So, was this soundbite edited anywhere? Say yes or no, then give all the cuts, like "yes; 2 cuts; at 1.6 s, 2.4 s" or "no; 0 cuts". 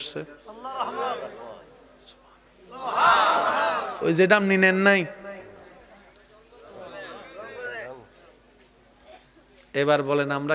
no; 0 cuts